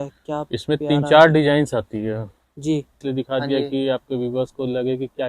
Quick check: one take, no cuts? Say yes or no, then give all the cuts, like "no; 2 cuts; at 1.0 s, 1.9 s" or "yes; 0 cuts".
no; 1 cut; at 3.0 s